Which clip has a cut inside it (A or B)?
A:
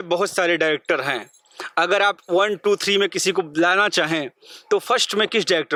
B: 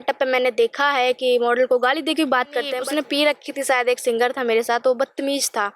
B